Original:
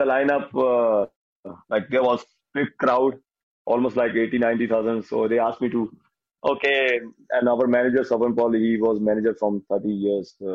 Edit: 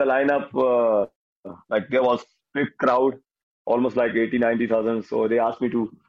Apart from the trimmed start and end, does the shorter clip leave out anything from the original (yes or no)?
no